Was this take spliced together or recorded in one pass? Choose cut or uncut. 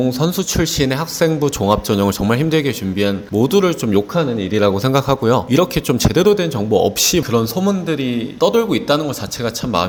uncut